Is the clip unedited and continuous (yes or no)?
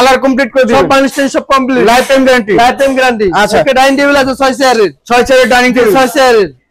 yes